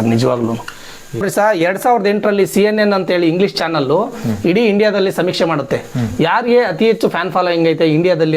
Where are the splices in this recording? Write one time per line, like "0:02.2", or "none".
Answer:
0:01.2